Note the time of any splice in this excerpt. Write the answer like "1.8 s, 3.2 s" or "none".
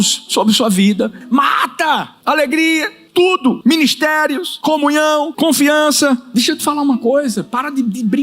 1.2 s, 2.1 s, 3.3 s, 4.5 s, 5.3 s, 6.3 s